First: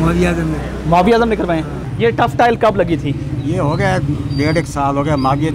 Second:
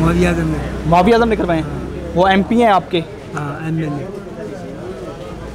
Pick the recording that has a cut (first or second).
first